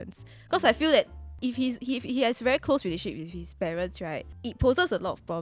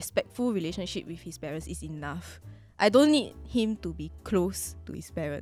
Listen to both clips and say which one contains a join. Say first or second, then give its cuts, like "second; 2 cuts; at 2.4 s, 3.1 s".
first; 2 cuts; at 1.2 s, 4.3 s